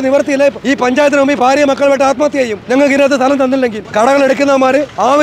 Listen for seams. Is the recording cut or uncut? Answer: cut